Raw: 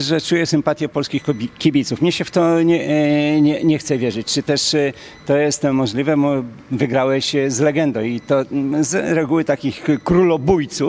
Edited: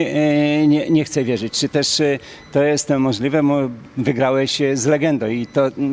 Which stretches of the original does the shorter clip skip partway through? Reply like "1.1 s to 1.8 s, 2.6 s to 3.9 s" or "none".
none